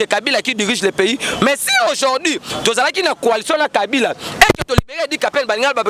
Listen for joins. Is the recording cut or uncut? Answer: uncut